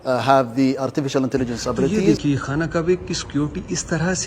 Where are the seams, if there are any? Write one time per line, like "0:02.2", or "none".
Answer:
0:02.0